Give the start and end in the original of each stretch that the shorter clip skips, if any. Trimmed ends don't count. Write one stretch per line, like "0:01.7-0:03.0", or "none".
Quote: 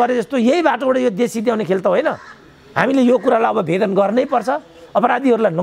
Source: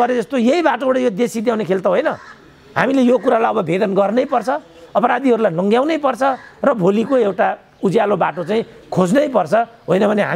none